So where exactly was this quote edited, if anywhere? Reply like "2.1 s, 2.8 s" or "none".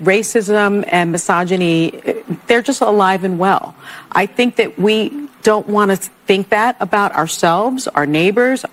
none